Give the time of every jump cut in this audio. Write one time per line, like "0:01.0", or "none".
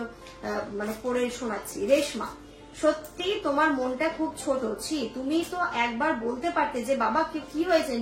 none